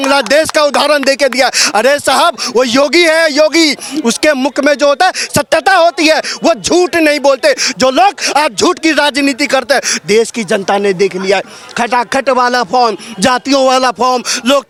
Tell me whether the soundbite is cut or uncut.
uncut